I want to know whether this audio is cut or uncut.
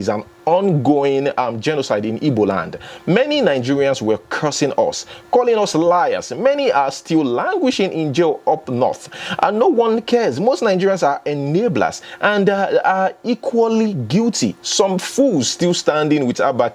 uncut